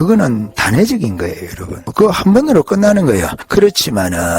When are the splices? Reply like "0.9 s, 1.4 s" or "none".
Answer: 1.9 s, 3.4 s